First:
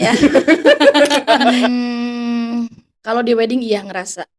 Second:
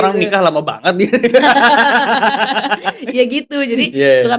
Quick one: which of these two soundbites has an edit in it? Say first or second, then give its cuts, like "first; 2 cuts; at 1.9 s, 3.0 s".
first; 1 cut; at 1.5 s